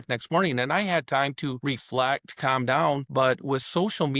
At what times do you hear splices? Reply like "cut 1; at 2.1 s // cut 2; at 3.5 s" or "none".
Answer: cut 1; at 1.6 s // cut 2; at 3.1 s